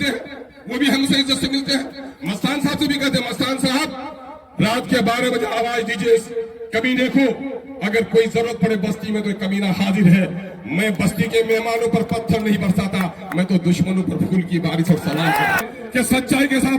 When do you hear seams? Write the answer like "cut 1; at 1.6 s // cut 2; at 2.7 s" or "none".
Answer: cut 1; at 15.6 s